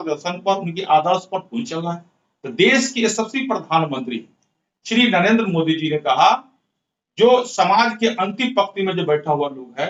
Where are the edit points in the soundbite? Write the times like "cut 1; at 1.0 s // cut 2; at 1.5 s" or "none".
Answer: none